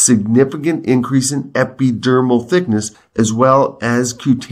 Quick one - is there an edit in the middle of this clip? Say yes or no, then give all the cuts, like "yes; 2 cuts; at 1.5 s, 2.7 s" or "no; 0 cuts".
yes; 1 cut; at 3.0 s